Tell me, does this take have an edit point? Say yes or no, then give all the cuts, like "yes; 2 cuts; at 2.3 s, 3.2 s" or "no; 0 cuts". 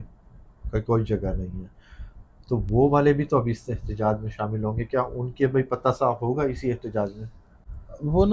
no; 0 cuts